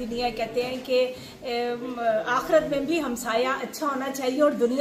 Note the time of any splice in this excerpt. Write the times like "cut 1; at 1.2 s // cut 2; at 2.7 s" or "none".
none